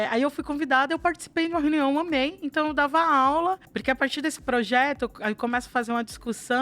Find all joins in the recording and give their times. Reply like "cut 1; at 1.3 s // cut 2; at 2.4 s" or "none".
cut 1; at 3.7 s